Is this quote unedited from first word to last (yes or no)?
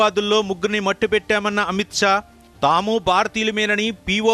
yes